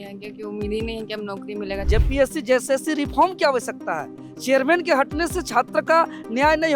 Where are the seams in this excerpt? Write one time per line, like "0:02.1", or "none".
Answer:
0:01.9